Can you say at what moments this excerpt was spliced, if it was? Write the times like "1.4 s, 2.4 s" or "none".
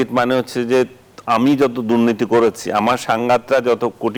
none